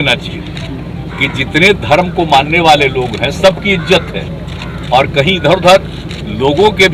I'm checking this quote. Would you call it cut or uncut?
uncut